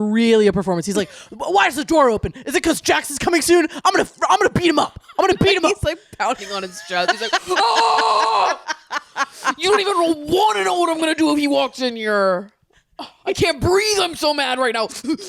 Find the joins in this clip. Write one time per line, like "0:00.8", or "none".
none